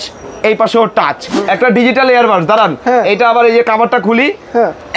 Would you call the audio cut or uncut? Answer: cut